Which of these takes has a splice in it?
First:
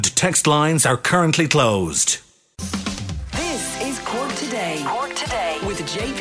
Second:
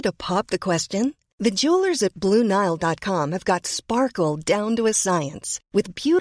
first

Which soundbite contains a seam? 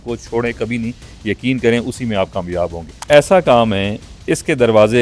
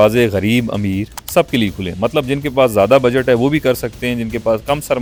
first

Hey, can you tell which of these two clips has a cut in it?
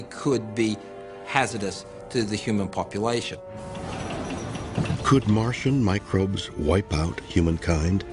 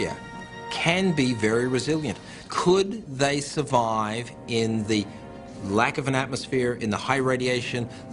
second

